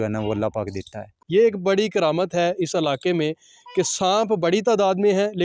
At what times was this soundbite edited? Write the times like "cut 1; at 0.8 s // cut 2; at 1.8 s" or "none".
cut 1; at 1.1 s